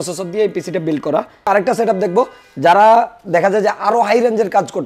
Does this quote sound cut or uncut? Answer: cut